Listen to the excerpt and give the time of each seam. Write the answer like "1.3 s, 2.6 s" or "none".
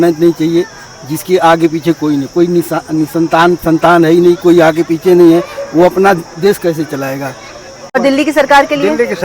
7.9 s